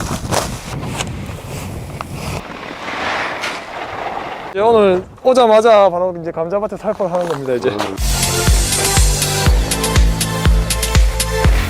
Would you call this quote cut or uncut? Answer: cut